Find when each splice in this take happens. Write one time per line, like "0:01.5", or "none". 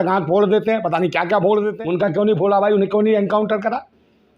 0:01.8